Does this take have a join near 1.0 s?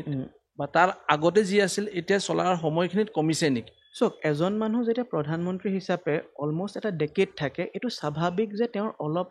no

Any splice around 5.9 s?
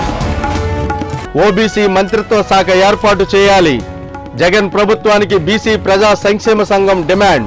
no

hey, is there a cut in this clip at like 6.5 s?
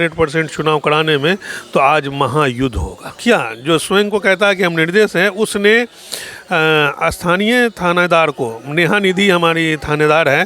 no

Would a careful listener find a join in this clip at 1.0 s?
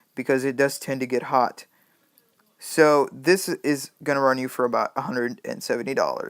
yes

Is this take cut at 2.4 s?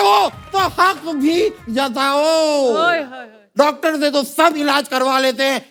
no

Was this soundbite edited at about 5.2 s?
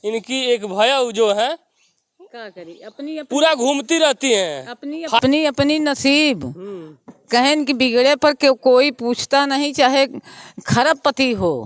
yes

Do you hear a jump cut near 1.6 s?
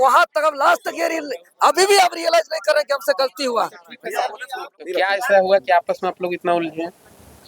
no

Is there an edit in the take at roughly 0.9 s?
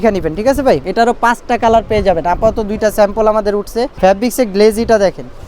yes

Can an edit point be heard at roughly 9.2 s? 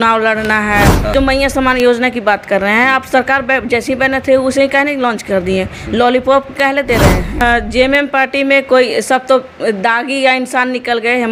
no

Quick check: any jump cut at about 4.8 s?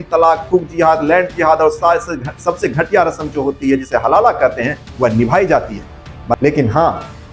no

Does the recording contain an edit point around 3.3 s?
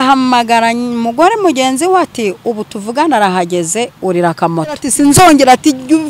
no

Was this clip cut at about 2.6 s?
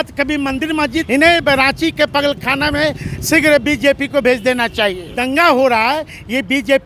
no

